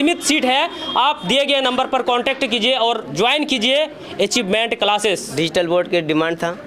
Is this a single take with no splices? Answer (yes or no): no